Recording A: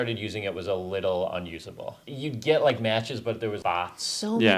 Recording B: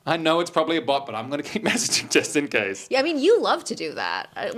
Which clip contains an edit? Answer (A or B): A